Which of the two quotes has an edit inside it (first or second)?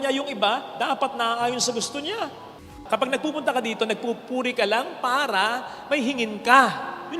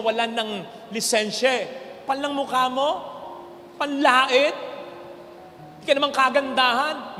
first